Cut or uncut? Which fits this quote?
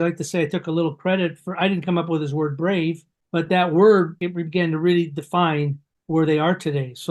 cut